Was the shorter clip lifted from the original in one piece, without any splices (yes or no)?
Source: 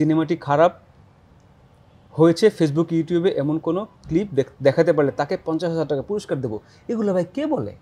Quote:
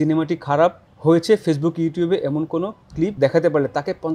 no